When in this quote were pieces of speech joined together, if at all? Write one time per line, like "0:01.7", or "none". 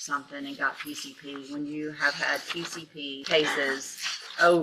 0:03.2